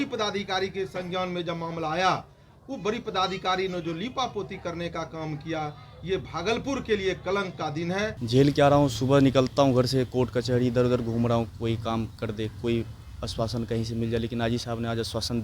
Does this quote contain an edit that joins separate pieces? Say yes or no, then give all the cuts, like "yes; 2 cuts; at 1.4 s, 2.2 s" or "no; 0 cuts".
yes; 1 cut; at 8.2 s